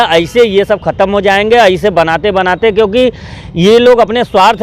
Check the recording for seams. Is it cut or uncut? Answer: uncut